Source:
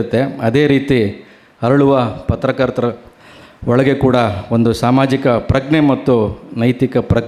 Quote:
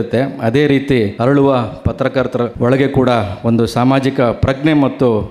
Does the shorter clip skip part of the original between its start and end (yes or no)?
yes